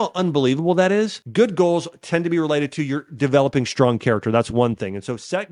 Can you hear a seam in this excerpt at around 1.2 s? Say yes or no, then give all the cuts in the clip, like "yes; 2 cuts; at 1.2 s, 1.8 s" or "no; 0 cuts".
yes; 1 cut; at 1.2 s